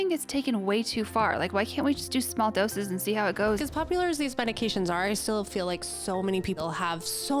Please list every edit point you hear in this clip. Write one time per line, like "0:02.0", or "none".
0:03.6
0:06.6